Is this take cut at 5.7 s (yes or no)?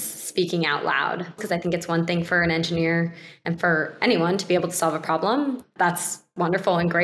yes